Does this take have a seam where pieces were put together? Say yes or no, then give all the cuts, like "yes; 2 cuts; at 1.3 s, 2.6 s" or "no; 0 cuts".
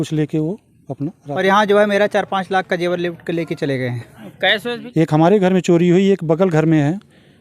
yes; 2 cuts; at 0.9 s, 4.8 s